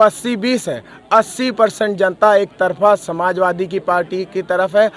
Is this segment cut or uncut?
uncut